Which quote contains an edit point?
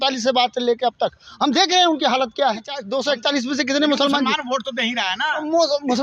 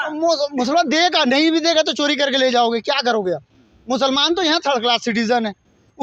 first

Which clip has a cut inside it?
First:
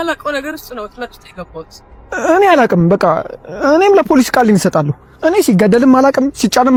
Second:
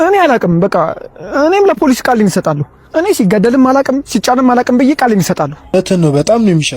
second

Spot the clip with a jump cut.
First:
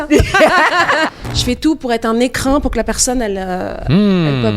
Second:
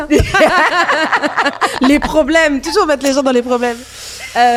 first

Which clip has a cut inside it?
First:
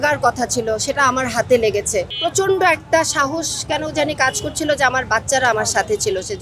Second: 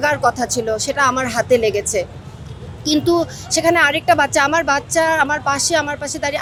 first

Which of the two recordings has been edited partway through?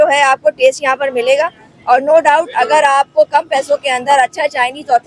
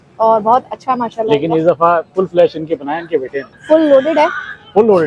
second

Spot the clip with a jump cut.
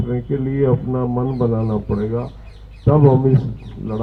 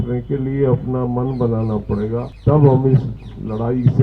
second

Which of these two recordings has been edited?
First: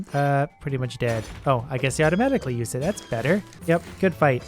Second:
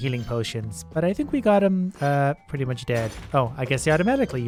first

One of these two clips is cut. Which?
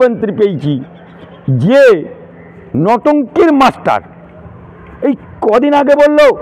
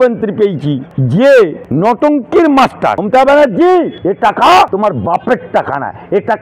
second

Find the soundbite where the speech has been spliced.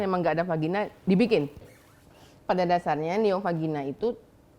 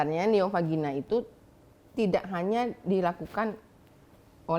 first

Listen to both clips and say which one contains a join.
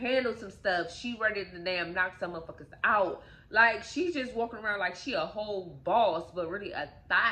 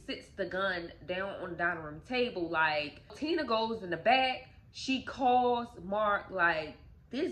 second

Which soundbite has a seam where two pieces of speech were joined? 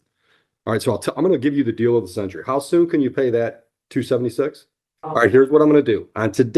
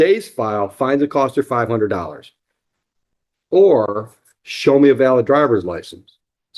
first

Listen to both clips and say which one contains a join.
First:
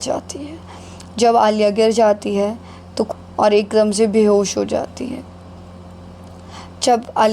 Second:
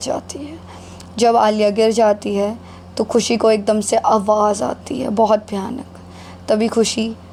first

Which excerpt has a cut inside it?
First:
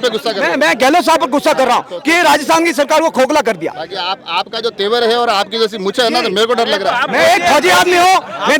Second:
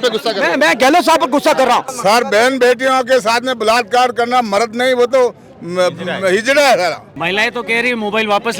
second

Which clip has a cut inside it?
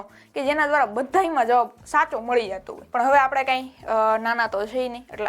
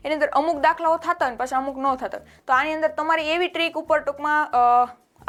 first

